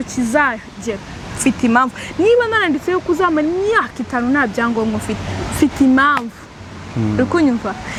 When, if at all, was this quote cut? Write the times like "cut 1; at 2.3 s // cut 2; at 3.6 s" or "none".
none